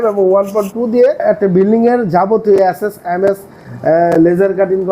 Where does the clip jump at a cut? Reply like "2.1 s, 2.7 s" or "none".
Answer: 1.2 s